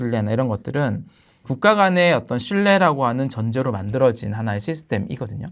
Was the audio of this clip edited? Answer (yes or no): no